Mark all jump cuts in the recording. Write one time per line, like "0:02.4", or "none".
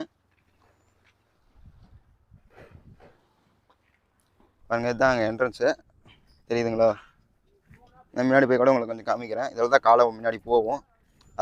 none